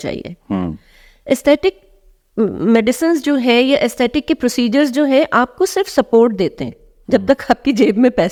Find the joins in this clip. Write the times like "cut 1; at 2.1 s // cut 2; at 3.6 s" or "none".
none